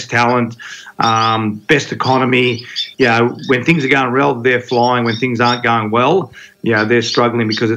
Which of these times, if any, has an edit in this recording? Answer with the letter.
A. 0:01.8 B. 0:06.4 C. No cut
C